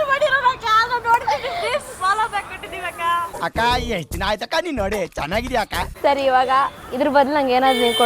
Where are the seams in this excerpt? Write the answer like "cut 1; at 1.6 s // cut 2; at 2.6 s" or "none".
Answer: cut 1; at 3.3 s // cut 2; at 5.9 s

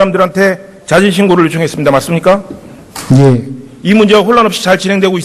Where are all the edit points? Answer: cut 1; at 1.2 s

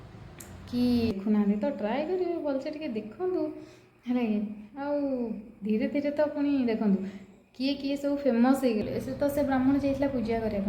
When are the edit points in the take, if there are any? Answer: cut 1; at 1.1 s // cut 2; at 8.8 s

